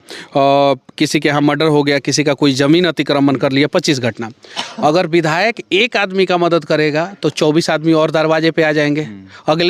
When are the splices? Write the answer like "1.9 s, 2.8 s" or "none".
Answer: none